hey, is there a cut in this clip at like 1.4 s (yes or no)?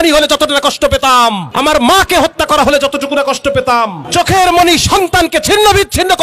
yes